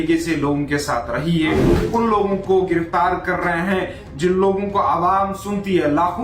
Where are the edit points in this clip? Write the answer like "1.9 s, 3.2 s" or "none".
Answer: 1.7 s